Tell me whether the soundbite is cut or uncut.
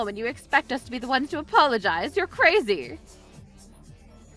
uncut